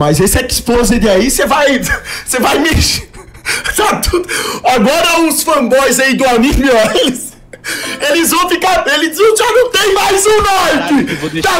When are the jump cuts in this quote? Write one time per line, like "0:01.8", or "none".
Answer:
none